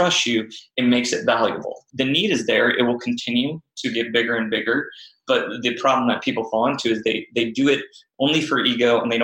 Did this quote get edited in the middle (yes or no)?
yes